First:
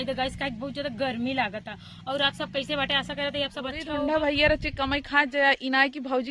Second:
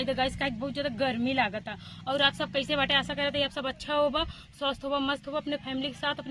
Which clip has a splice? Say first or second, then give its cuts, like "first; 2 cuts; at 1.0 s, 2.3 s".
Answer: first; 1 cut; at 3.8 s